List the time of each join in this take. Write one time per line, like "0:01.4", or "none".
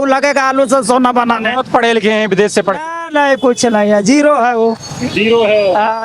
none